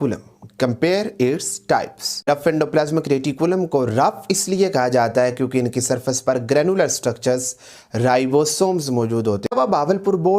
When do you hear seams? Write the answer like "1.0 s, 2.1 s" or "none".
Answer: 2.3 s, 9.5 s